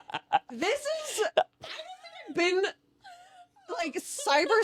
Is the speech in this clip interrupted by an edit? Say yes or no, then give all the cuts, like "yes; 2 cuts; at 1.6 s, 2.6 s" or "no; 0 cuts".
no; 0 cuts